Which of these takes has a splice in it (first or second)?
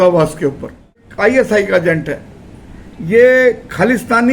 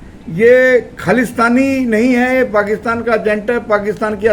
first